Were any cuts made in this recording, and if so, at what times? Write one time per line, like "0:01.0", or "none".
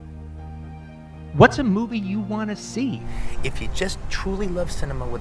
0:03.1